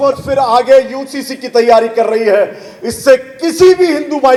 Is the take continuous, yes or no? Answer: yes